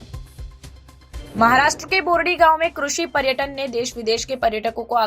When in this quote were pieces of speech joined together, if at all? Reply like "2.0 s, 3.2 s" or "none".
1.0 s